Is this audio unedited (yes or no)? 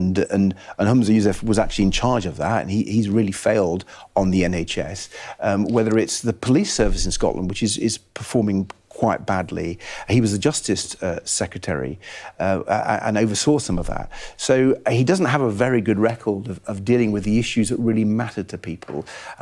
yes